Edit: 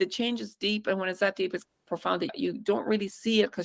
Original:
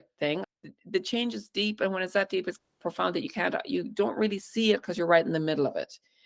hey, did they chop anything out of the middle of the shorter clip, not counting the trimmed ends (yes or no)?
yes